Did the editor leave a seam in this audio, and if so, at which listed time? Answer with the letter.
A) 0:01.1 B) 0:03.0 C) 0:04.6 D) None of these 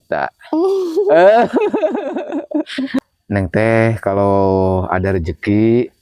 B